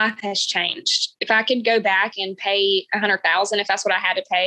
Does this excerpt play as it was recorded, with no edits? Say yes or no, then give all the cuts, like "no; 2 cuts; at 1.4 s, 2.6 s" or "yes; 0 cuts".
no; 1 cut; at 1.2 s